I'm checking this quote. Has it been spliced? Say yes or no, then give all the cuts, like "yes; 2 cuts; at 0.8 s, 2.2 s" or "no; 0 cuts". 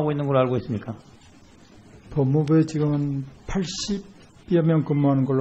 yes; 1 cut; at 0.9 s